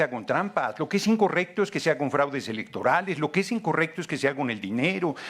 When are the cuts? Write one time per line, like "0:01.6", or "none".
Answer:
none